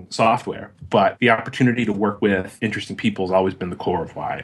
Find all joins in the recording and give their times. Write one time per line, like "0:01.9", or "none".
0:01.2
0:02.3